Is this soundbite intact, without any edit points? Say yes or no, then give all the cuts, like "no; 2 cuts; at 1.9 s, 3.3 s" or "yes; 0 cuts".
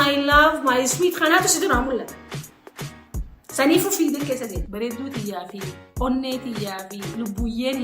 no; 1 cut; at 4.6 s